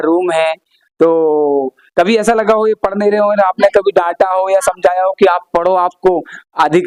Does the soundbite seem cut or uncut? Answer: uncut